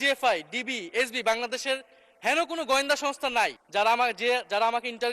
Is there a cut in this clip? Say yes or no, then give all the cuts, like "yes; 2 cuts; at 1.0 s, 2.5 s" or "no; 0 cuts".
yes; 1 cut; at 3.6 s